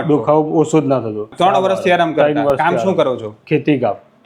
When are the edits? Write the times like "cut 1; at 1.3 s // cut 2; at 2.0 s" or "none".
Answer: cut 1; at 1.3 s

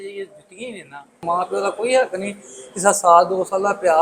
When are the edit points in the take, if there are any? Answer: cut 1; at 1.2 s

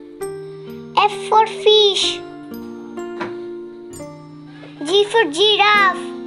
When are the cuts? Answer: cut 1; at 0.9 s // cut 2; at 2.2 s // cut 3; at 4.3 s

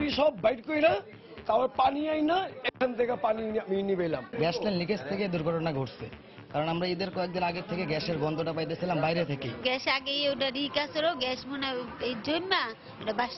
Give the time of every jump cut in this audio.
cut 1; at 4.2 s // cut 2; at 9.5 s

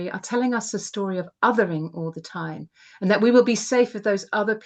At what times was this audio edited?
none

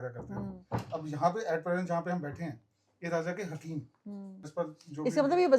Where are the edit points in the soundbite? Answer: cut 1; at 4.5 s

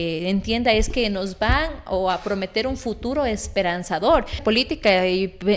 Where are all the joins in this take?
cut 1; at 4.4 s

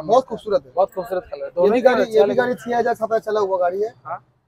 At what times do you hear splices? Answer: none

